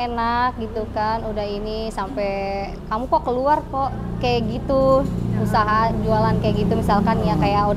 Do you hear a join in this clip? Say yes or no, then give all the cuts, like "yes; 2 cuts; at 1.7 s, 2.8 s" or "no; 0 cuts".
no; 0 cuts